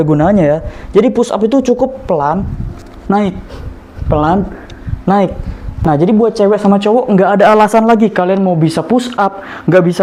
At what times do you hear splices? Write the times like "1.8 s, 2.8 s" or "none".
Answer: none